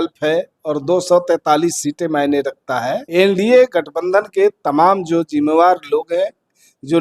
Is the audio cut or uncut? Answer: cut